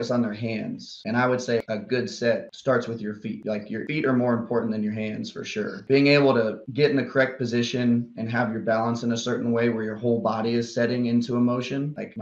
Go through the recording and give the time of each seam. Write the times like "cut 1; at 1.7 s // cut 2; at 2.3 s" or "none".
cut 1; at 1.0 s // cut 2; at 1.6 s // cut 3; at 3.8 s // cut 4; at 5.8 s